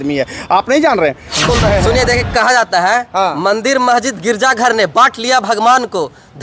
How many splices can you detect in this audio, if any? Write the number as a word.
one